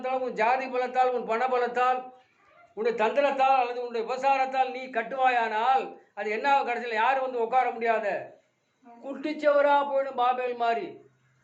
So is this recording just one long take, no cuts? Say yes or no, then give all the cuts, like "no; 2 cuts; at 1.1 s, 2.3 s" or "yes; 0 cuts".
yes; 0 cuts